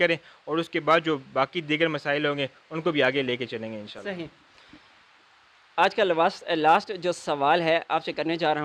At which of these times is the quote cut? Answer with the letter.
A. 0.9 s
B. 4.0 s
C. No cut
C